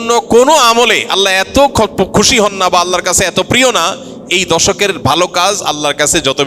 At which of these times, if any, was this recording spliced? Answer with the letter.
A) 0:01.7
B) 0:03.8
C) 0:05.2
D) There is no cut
D